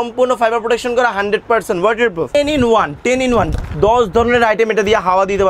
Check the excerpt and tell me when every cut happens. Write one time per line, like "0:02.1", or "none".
0:02.3